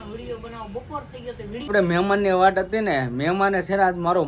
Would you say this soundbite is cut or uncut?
cut